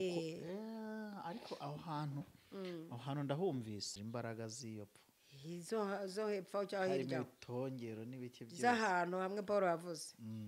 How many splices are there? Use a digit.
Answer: 1